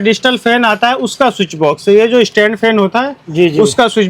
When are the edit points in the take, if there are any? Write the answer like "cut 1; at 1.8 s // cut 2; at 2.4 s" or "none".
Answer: none